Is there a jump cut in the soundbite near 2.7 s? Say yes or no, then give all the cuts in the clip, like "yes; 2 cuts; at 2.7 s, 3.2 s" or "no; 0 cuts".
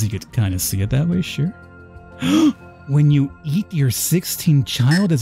yes; 1 cut; at 2.7 s